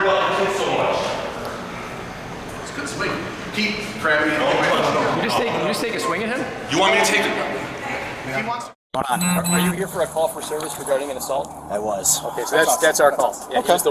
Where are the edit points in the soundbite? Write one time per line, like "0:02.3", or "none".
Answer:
0:08.5